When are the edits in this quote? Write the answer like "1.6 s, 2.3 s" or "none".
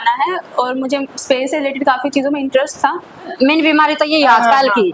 3.3 s